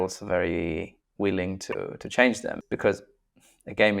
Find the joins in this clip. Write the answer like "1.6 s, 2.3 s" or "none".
1.0 s, 2.6 s